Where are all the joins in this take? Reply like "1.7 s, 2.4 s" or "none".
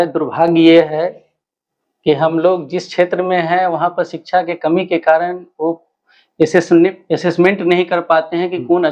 none